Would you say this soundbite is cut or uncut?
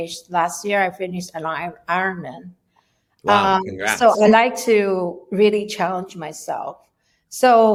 uncut